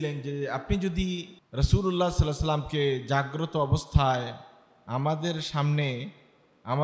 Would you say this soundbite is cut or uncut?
cut